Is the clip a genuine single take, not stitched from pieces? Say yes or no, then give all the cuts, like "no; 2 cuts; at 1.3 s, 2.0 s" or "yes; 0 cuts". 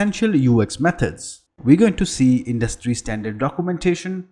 no; 1 cut; at 1.4 s